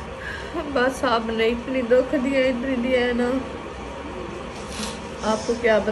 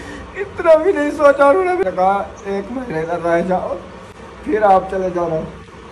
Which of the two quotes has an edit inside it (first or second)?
second